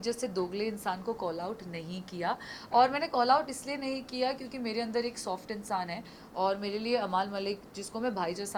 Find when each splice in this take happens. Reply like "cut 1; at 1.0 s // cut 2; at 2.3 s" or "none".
none